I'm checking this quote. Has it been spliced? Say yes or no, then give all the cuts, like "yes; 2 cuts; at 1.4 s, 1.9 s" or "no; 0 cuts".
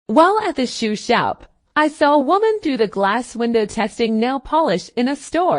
yes; 1 cut; at 1.5 s